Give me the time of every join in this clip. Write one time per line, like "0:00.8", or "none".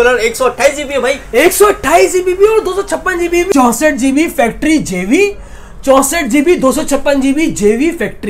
0:03.5